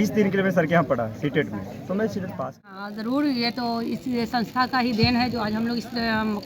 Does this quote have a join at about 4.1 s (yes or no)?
no